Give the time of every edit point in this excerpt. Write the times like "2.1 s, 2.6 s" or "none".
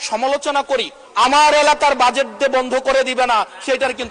1.0 s